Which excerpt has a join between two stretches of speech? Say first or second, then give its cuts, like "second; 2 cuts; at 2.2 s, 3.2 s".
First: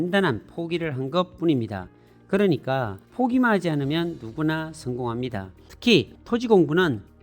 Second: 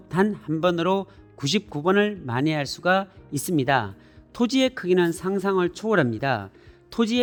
first; 1 cut; at 5.6 s